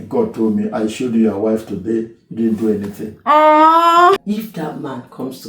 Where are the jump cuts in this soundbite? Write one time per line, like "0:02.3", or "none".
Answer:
0:04.2